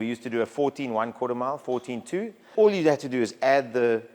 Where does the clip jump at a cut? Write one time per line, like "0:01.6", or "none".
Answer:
0:02.5